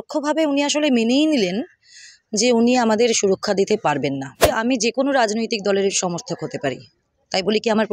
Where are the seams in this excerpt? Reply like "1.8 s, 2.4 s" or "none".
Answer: 4.5 s